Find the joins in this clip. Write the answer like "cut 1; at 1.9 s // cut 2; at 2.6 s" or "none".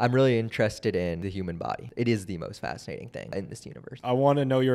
cut 1; at 1.6 s // cut 2; at 3.7 s